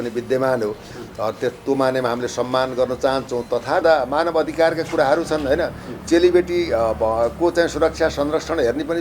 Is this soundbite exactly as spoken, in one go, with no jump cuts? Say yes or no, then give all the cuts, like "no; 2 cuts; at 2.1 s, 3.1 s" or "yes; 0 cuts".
no; 1 cut; at 3.8 s